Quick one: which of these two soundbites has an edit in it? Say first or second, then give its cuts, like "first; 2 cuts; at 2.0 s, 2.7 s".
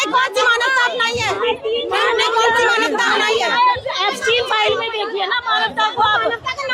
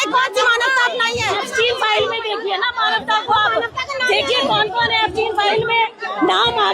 second; 1 cut; at 1.4 s